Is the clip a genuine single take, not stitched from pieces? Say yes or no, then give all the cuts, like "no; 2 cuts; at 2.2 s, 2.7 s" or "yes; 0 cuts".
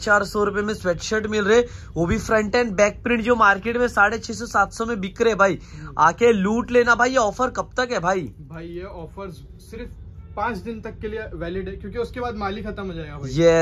yes; 0 cuts